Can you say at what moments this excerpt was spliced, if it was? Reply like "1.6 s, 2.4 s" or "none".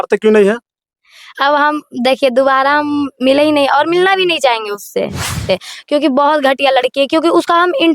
5.4 s